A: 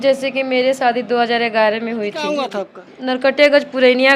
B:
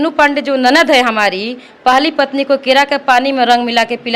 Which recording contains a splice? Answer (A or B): A